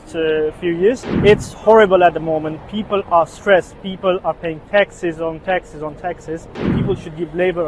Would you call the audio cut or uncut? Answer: cut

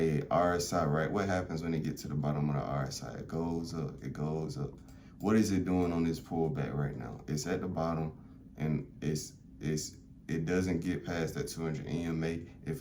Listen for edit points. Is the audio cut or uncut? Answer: uncut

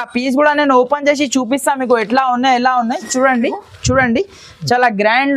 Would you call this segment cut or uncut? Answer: cut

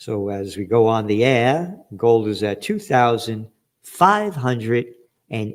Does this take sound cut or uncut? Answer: uncut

